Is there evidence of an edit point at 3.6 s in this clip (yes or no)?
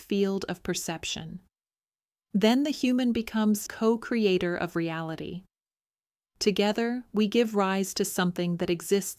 yes